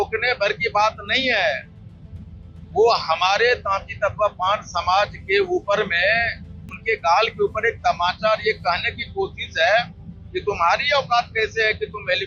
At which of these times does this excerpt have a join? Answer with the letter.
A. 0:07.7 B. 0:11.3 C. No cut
C